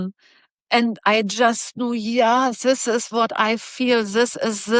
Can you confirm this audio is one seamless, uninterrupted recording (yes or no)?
yes